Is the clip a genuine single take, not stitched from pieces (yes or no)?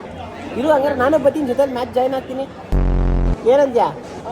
yes